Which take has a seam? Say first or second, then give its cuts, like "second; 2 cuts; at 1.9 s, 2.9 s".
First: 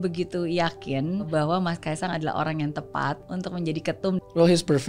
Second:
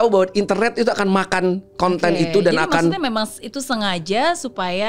first; 3 cuts; at 1.3 s, 3.2 s, 4.2 s